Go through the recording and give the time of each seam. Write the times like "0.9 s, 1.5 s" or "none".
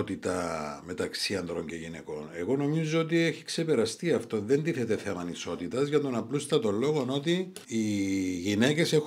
7.6 s